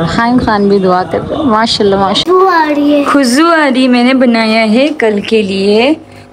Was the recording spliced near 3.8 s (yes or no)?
no